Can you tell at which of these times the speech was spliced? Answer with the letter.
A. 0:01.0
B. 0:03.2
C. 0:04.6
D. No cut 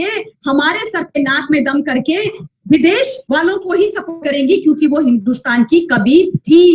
B